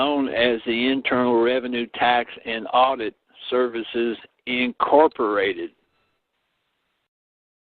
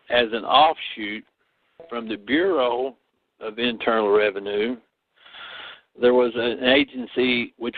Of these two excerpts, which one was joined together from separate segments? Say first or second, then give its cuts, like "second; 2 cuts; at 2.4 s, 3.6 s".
first; 1 cut; at 1.9 s